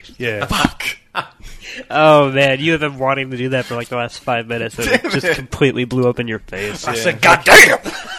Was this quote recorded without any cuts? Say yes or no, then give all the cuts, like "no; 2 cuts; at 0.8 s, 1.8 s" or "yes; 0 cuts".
no; 1 cut; at 6.8 s